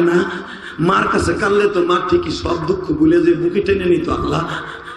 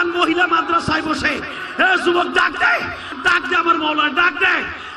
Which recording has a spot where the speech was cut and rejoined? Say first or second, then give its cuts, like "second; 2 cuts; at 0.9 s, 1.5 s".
second; 1 cut; at 3.2 s